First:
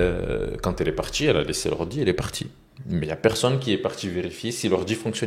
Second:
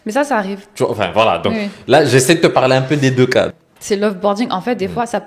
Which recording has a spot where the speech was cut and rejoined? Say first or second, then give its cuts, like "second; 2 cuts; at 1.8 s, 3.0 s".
second; 1 cut; at 3.5 s